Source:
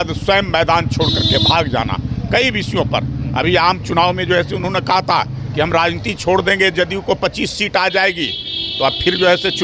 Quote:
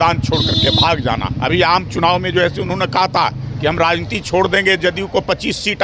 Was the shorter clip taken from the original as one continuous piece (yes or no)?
no